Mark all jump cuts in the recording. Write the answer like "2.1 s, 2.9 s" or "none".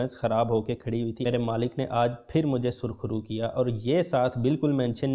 1.3 s